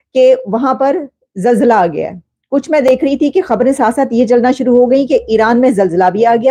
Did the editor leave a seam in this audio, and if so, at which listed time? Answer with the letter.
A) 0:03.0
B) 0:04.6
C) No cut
C